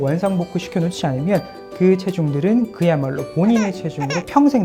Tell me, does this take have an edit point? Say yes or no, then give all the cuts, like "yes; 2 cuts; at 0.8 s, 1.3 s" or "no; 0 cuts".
no; 0 cuts